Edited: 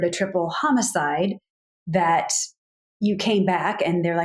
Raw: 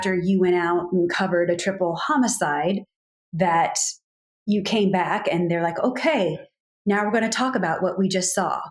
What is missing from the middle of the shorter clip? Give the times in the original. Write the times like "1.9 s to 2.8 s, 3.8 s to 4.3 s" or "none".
none

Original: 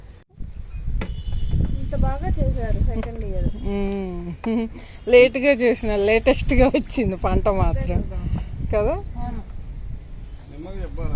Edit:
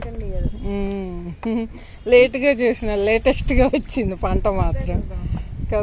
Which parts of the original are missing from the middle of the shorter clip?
none

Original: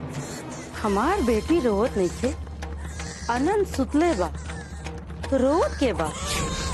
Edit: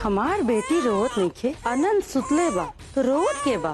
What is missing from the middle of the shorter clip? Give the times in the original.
2.4 s to 3.2 s, 4.4 s to 5.1 s

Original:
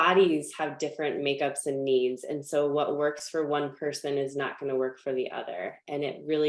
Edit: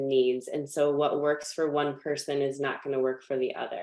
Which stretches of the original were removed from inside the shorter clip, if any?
none

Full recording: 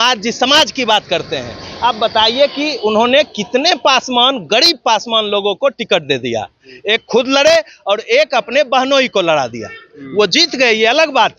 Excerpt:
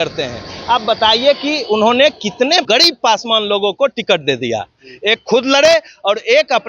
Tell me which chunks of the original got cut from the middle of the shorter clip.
3.8 s to 4.5 s

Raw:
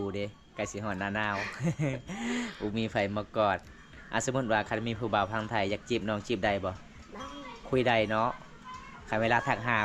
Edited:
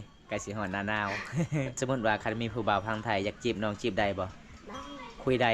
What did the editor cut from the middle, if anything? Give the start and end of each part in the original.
2.0 s to 4.2 s

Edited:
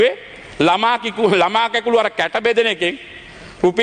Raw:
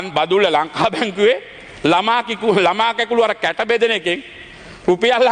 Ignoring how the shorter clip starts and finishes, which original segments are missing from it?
none

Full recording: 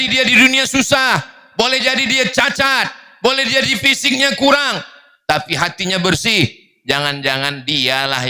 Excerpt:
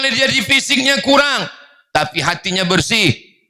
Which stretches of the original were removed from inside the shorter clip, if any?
none

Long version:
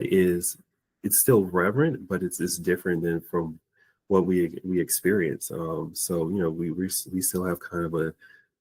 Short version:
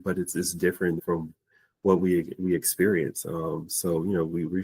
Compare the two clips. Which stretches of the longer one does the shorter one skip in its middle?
3.0 s to 3.2 s

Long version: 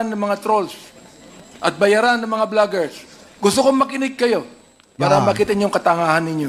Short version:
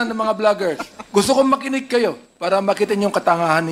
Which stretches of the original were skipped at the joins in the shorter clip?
3.0 s to 3.2 s, 4.6 s to 4.9 s

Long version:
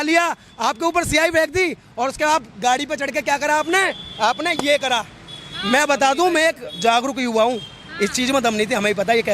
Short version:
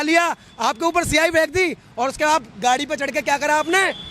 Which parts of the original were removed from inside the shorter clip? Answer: none

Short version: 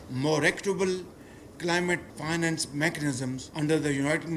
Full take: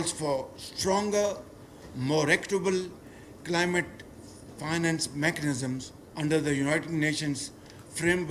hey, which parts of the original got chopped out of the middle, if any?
4.0 s to 4.5 s, 5.9 s to 6.1 s

